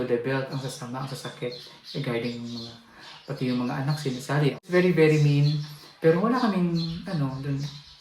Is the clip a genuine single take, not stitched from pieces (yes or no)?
no